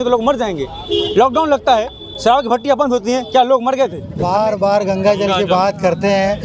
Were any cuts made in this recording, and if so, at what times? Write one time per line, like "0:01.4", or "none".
0:04.1